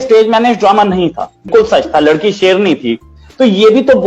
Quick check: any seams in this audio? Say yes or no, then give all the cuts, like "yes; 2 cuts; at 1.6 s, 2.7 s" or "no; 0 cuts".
yes; 1 cut; at 1.5 s